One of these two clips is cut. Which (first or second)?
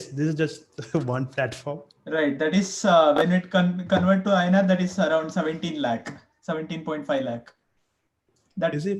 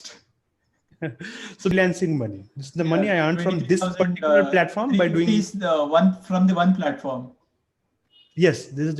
second